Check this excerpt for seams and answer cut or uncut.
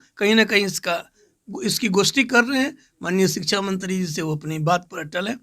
uncut